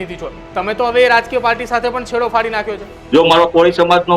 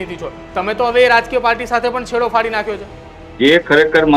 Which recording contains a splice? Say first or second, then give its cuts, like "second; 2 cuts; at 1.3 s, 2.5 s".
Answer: first; 1 cut; at 3.0 s